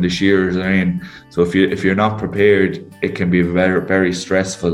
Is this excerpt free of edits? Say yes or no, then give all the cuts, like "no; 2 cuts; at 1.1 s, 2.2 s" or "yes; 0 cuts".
yes; 0 cuts